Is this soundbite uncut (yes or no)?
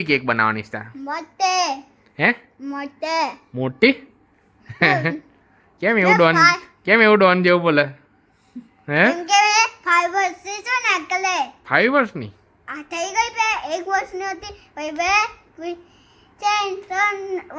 yes